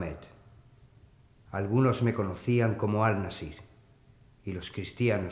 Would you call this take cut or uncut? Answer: cut